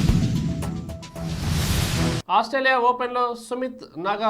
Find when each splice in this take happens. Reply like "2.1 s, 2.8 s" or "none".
2.2 s

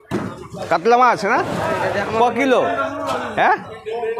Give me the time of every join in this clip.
1.5 s

